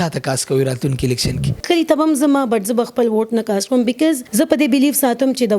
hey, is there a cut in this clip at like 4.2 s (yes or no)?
yes